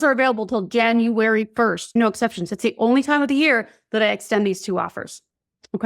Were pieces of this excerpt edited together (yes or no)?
yes